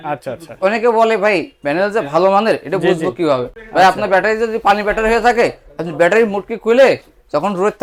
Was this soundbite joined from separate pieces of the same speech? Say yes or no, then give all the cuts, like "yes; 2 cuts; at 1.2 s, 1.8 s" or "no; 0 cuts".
no; 0 cuts